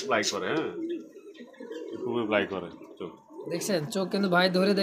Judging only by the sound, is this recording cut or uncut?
uncut